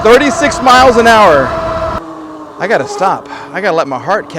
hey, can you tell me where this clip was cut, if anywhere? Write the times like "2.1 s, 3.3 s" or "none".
2.0 s